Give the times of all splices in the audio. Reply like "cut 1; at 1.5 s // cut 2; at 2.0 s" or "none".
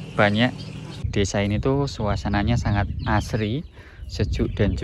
cut 1; at 1.1 s